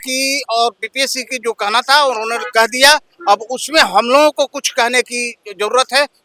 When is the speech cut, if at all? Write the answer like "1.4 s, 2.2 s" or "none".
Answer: none